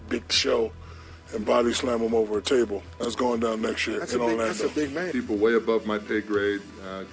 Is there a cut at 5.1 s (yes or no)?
yes